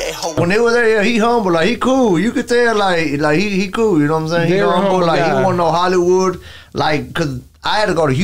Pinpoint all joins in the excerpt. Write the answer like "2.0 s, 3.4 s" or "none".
none